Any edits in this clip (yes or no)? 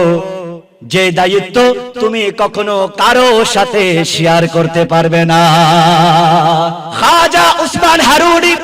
yes